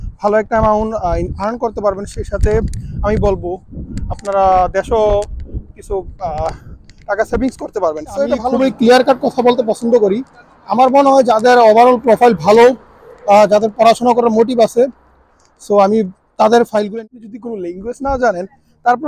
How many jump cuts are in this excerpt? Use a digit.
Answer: 2